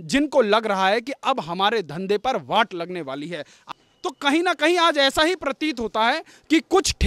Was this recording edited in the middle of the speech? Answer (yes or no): yes